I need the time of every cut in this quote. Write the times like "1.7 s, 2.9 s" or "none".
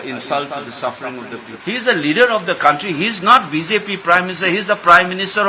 1.5 s